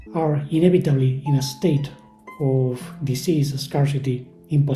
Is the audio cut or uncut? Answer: uncut